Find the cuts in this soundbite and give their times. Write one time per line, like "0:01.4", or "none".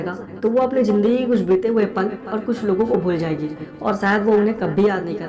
none